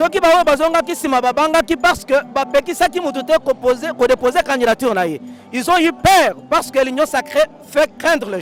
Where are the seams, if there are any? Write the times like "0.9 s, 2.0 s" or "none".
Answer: none